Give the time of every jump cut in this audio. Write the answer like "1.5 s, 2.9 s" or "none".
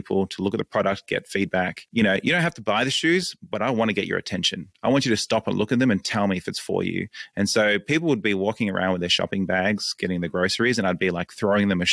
1.8 s